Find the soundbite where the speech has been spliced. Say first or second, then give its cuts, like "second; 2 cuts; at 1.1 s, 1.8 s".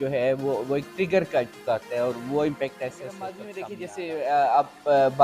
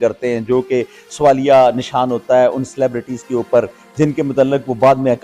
first; 1 cut; at 3.5 s